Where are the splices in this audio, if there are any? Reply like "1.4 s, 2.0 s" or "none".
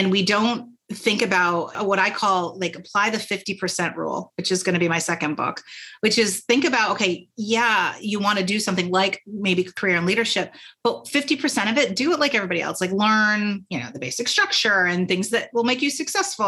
1.7 s, 9.7 s